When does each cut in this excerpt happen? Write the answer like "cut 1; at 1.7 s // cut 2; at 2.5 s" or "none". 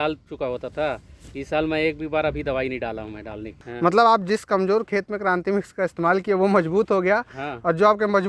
cut 1; at 3.6 s